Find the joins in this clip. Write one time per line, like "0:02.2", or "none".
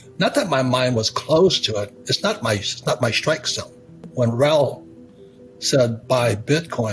0:04.0